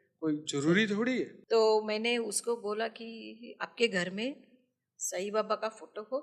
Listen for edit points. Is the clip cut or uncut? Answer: cut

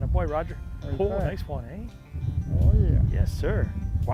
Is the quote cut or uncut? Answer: uncut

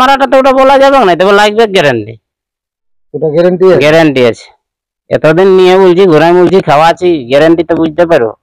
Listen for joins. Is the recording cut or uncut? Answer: uncut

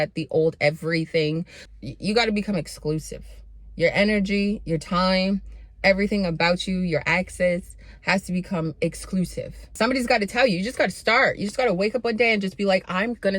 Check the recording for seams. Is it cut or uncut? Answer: cut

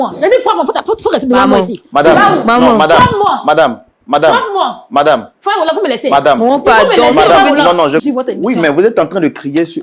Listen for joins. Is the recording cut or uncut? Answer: cut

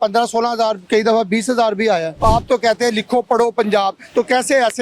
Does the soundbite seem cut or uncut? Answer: cut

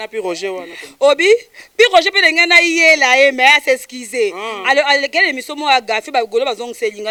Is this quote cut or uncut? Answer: uncut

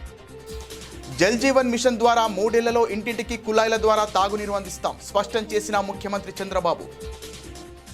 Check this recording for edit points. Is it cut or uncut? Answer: cut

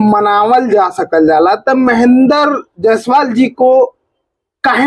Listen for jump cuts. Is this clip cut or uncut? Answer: uncut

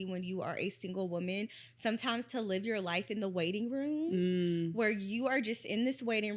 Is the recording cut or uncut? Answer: uncut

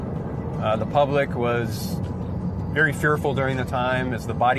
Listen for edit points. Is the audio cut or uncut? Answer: uncut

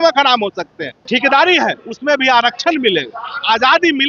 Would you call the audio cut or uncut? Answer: cut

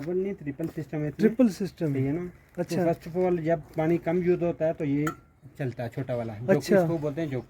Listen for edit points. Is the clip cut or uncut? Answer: uncut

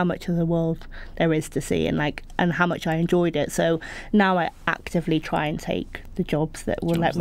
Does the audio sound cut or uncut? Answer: uncut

